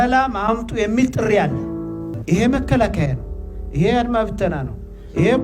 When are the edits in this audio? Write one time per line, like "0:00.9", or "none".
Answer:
0:02.1